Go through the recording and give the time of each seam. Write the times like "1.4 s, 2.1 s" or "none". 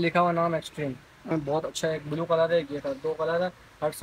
1.3 s